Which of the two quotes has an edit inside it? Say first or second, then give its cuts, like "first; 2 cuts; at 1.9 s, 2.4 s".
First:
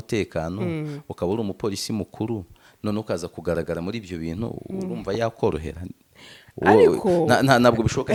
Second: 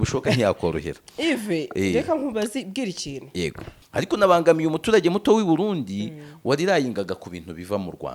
second; 1 cut; at 3.7 s